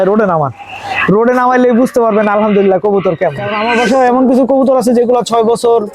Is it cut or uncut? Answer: cut